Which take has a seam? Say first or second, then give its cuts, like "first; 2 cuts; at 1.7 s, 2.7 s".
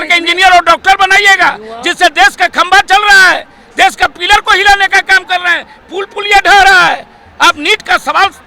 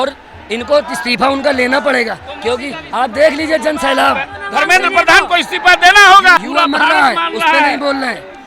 second; 2 cuts; at 4.4 s, 6.4 s